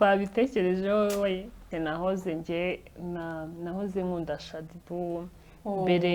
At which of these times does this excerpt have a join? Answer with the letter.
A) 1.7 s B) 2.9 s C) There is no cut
A